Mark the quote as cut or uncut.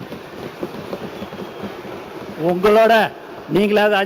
uncut